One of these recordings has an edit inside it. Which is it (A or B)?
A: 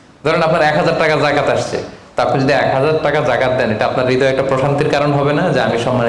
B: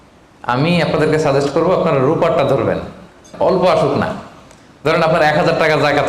B